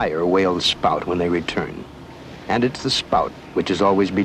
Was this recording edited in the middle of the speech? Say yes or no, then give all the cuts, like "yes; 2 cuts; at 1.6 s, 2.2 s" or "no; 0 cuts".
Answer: yes; 1 cut; at 1.2 s